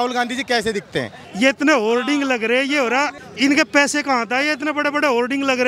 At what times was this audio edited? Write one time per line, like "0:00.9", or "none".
0:01.2
0:03.1